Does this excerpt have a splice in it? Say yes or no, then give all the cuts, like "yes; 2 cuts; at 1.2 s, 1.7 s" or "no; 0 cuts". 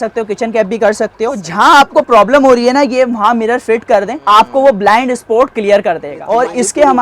yes; 3 cuts; at 1.4 s, 4.1 s, 6.1 s